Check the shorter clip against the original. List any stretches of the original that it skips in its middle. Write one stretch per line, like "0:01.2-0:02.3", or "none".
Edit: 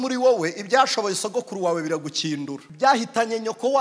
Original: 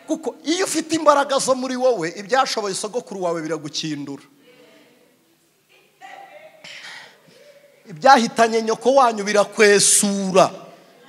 0:04.2-0:07.9